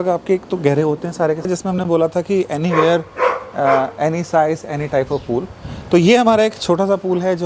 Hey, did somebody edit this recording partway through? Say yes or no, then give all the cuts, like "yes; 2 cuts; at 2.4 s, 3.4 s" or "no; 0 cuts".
yes; 1 cut; at 1.5 s